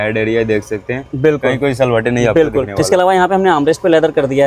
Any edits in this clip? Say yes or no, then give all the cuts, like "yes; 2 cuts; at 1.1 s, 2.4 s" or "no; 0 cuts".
no; 0 cuts